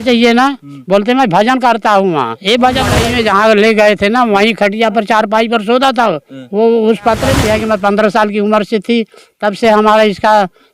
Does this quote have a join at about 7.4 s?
yes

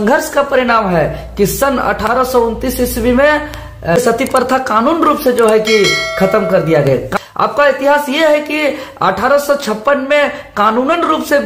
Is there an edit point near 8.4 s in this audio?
no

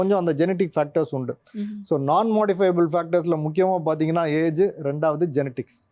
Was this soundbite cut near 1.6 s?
no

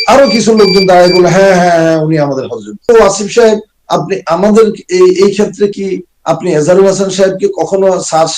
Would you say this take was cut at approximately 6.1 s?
no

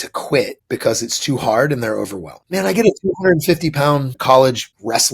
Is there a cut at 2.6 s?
no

